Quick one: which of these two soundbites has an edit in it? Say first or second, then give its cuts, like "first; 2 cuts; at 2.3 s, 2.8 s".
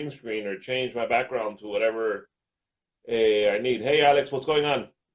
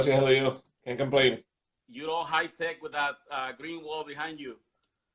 second; 1 cut; at 1.3 s